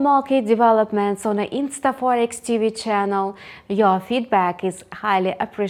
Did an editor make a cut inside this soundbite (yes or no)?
no